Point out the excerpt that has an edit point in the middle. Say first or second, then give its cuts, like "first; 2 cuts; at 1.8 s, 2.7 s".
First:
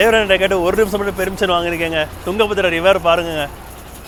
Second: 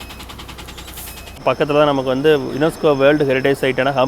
second; 1 cut; at 1.4 s